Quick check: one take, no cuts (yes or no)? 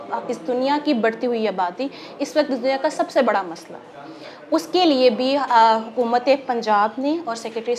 yes